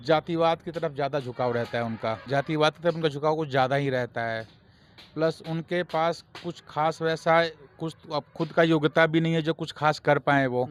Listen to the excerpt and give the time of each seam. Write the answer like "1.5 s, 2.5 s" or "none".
none